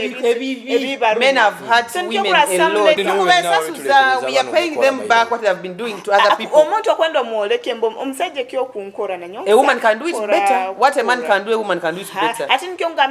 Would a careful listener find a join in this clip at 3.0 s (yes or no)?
yes